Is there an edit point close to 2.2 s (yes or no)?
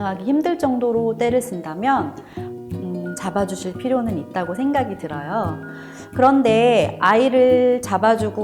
no